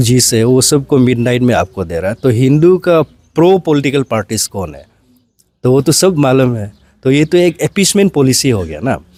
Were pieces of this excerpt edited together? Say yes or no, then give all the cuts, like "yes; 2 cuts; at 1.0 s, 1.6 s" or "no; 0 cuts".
no; 0 cuts